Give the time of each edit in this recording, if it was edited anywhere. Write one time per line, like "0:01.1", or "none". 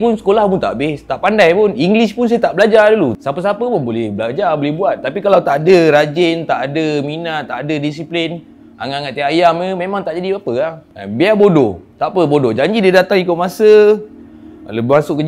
0:03.2